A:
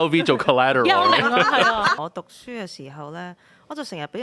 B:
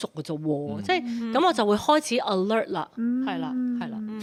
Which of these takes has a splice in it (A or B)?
A